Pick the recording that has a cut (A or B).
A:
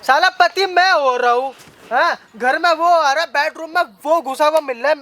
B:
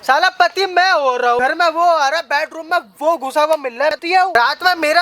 B